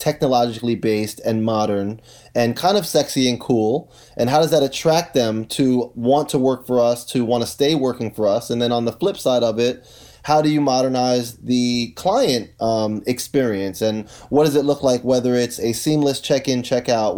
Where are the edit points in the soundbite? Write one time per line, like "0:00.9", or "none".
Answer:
none